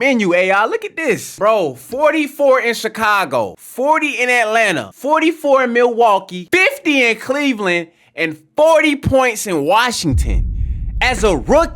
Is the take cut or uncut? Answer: cut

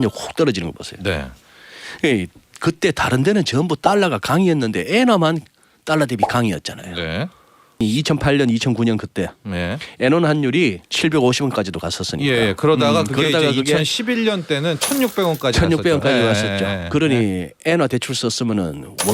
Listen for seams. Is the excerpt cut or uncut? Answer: cut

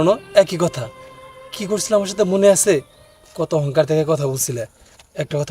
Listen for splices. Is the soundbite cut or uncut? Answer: uncut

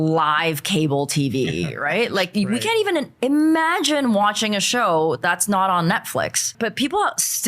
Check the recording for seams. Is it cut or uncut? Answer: cut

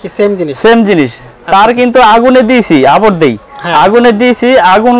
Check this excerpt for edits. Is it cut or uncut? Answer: uncut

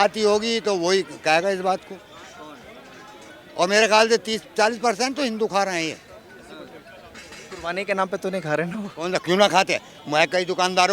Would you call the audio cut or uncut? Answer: uncut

